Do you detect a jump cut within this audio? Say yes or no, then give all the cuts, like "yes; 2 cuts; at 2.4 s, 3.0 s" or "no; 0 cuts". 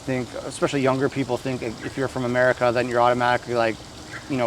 no; 0 cuts